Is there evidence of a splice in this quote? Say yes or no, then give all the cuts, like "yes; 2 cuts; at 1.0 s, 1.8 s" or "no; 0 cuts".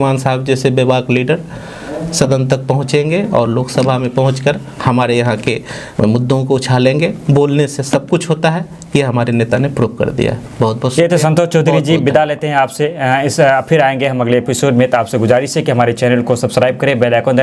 no; 0 cuts